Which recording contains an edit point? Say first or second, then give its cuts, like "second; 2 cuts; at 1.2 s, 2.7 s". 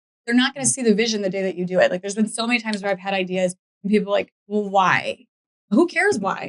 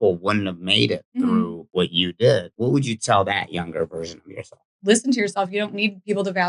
second; 3 cuts; at 1.7 s, 2.5 s, 4.8 s